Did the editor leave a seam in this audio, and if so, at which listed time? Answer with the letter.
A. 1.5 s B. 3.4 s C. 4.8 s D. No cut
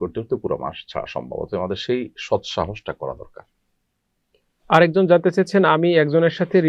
D